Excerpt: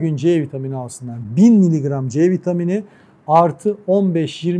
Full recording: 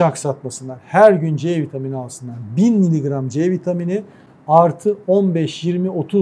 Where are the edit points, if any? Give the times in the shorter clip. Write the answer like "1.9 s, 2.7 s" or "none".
none

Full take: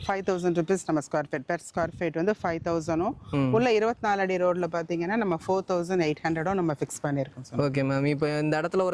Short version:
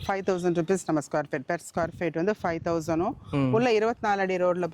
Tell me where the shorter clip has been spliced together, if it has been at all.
none

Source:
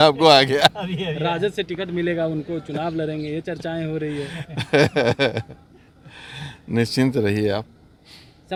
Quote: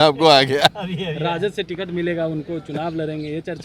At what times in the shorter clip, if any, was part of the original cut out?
none

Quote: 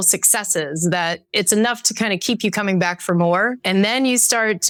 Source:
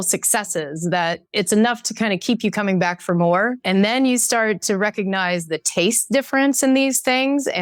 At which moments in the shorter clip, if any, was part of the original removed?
none

